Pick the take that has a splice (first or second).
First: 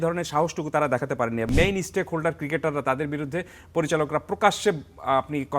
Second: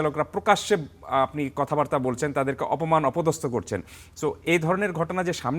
first